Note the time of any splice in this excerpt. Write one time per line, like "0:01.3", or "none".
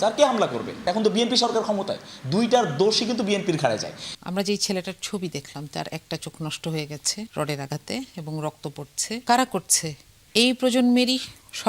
0:00.8
0:04.1
0:07.3
0:09.2